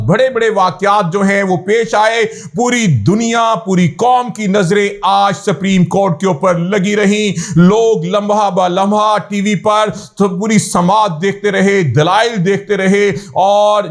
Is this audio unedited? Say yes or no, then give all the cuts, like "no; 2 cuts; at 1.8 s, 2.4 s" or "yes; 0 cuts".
yes; 0 cuts